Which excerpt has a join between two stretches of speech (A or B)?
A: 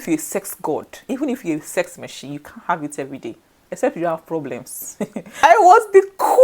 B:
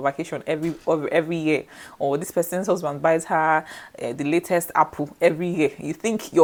A